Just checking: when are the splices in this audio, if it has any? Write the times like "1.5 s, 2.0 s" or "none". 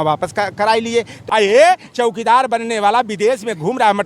1.2 s